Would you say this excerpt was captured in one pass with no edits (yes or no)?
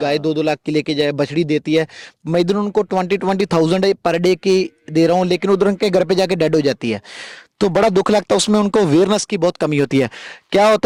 yes